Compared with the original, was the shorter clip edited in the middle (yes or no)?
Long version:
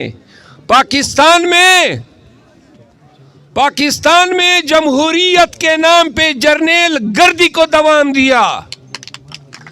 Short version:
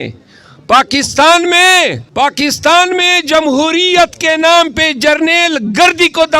yes